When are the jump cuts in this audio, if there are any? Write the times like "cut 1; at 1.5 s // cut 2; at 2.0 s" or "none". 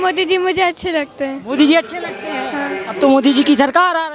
none